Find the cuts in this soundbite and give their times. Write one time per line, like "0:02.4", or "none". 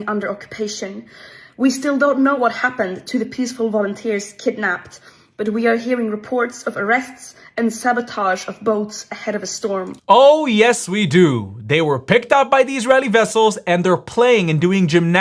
none